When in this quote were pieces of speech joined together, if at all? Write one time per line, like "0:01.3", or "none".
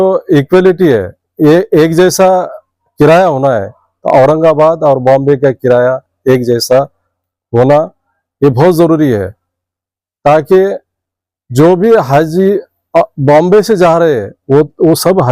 none